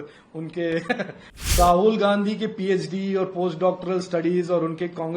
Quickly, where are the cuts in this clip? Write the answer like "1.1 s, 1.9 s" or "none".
1.6 s